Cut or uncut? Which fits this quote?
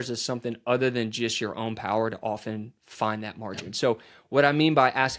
uncut